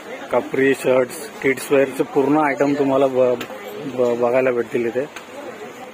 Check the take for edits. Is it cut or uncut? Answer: uncut